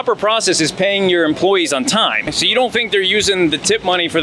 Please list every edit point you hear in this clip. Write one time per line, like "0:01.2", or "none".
0:02.3